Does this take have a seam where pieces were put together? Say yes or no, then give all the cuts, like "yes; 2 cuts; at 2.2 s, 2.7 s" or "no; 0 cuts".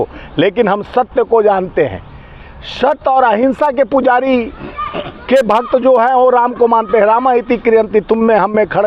no; 0 cuts